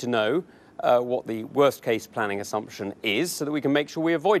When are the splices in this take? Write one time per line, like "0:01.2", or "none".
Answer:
none